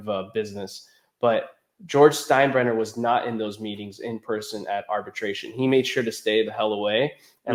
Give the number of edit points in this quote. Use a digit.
0